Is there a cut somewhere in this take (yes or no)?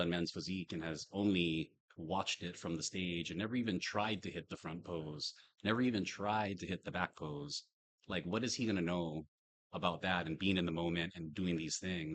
no